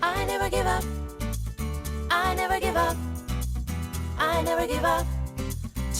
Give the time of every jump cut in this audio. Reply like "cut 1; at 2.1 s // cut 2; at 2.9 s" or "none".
none